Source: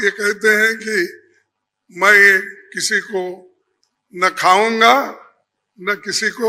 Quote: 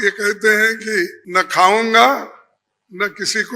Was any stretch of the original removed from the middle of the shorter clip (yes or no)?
yes